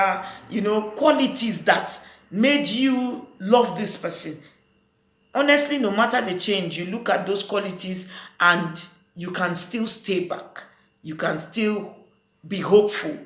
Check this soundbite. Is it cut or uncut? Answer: uncut